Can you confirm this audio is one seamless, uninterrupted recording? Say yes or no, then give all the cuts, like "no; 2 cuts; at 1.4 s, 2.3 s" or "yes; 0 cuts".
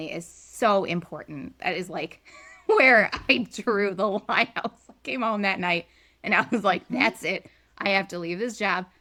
yes; 0 cuts